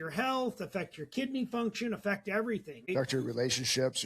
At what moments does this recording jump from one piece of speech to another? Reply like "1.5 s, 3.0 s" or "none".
2.8 s

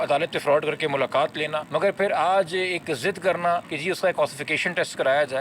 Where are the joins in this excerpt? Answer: 1.6 s, 3.7 s

